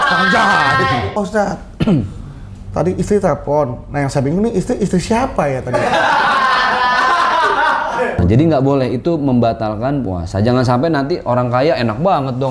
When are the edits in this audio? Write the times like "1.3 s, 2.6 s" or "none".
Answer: 1.2 s, 8.2 s

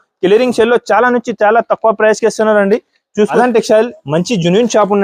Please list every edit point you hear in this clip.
3.3 s

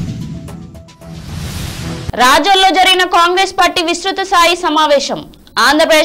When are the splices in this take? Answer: 2.1 s

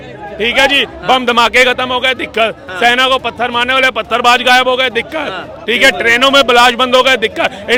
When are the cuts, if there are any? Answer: none

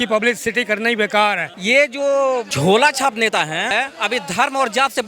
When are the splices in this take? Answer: 1.5 s, 2.5 s, 3.7 s

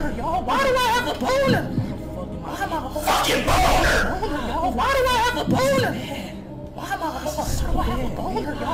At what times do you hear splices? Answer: none

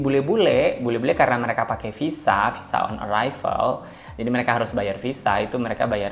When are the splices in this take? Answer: none

